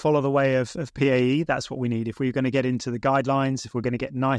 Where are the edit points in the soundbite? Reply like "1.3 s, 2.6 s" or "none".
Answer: none